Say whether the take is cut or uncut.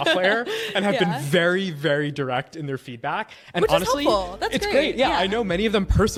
uncut